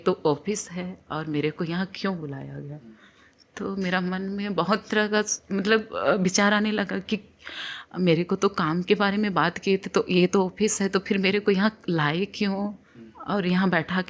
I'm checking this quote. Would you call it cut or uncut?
uncut